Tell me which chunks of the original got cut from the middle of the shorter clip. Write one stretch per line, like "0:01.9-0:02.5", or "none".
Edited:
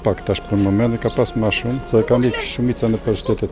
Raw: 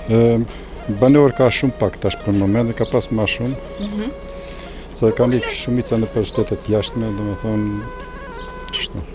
0:03.6-0:04.9